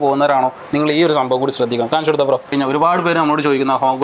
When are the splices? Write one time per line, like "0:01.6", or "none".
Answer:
0:02.5

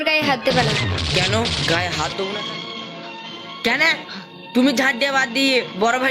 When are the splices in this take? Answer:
0:02.4

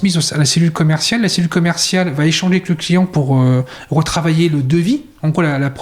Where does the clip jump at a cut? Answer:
none

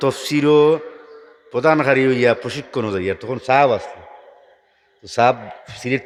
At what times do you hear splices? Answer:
none

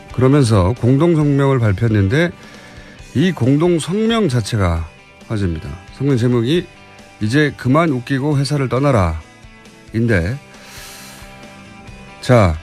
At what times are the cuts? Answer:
none

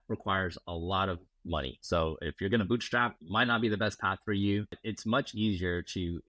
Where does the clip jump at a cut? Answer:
0:01.8
0:03.2
0:04.8

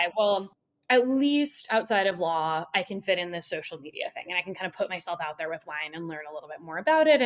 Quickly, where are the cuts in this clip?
none

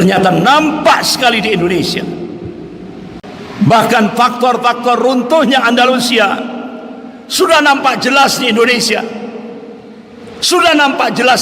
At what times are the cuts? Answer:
0:03.2

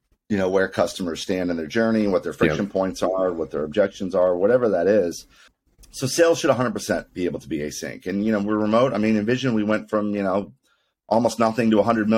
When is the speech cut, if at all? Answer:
none

